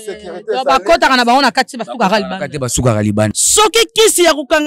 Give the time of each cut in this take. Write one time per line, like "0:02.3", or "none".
0:03.3